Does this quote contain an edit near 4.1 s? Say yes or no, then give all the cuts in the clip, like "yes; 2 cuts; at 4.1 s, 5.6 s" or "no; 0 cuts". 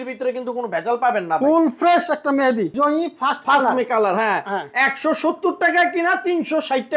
no; 1 cut; at 2.7 s